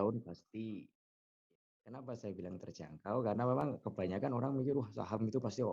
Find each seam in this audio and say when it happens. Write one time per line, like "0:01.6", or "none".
0:01.4